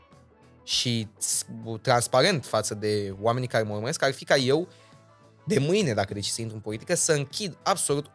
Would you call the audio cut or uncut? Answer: uncut